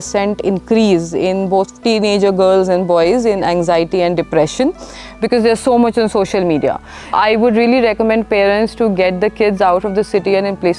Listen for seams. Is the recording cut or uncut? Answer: cut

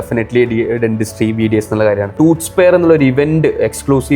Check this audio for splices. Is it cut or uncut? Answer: cut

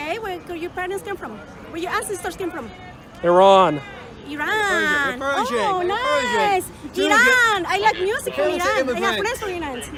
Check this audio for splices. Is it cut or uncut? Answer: uncut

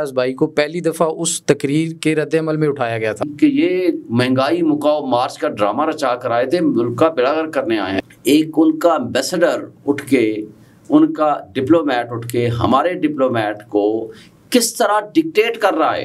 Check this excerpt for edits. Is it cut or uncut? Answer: cut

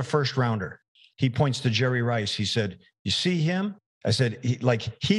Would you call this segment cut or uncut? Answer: cut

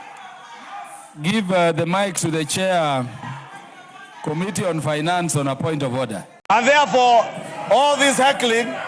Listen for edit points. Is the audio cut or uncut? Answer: cut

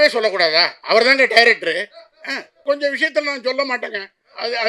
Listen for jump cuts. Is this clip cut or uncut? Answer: cut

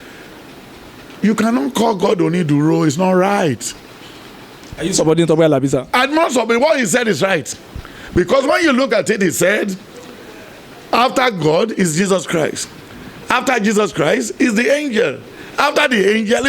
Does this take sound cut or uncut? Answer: uncut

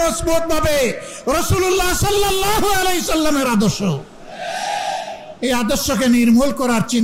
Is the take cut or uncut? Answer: uncut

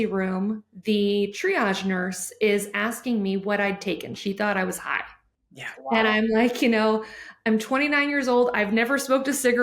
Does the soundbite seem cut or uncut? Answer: cut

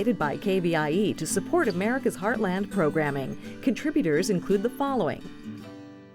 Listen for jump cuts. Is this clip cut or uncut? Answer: cut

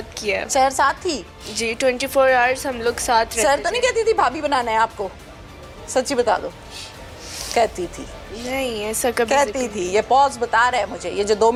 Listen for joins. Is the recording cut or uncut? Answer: uncut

